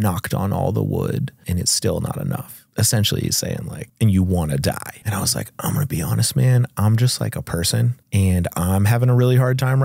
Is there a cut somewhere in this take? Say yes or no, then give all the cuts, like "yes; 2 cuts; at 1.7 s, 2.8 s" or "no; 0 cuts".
yes; 5 cuts; at 1.4 s, 2.6 s, 3.8 s, 4.9 s, 8.0 s